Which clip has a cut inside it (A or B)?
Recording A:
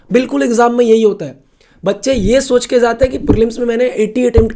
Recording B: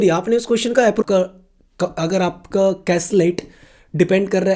B